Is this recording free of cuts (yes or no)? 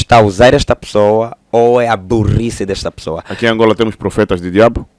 no